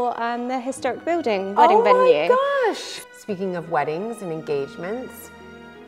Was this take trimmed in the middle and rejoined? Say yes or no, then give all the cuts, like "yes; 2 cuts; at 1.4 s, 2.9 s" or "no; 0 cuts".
yes; 1 cut; at 2.9 s